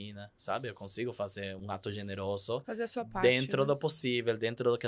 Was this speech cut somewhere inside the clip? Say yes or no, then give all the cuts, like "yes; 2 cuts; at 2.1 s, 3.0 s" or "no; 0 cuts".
yes; 1 cut; at 1.6 s